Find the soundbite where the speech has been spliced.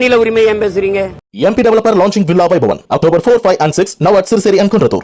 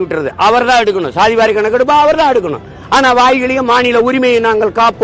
first; 1 cut; at 1.2 s

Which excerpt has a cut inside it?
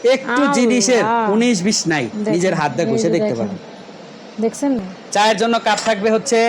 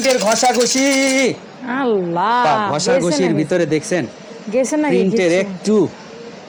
first; 1 cut; at 4.9 s

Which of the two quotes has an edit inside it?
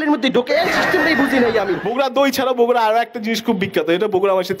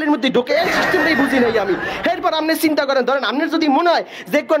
first; 1 cut; at 1.8 s

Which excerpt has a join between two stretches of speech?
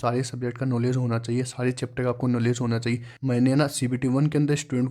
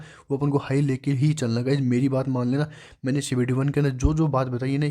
first; 1 cut; at 3.1 s

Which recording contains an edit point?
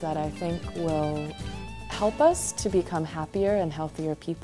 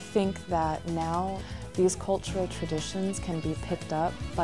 second; 1 cut; at 1.4 s

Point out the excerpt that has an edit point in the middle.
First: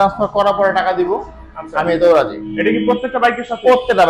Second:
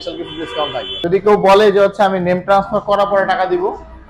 second; 1 cut; at 0.9 s

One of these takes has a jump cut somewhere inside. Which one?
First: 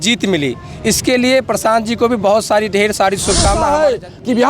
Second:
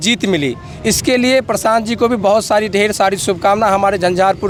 first; 1 cut; at 3.6 s

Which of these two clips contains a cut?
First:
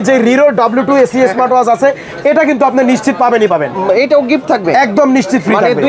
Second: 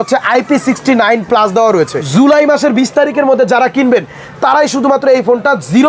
second; 1 cut; at 2.0 s

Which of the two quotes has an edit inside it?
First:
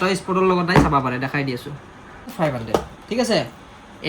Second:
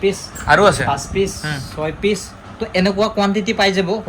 first; 1 cut; at 2.3 s

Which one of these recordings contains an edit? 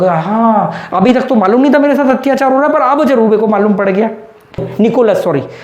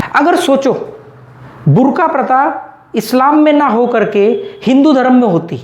first; 1 cut; at 4.7 s

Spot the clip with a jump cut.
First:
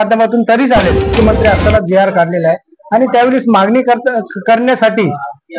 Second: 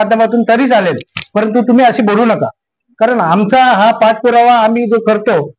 first; 1 cut; at 1.1 s

